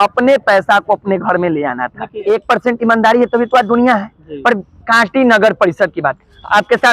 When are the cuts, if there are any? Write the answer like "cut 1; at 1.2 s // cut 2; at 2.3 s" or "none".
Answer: cut 1; at 2.1 s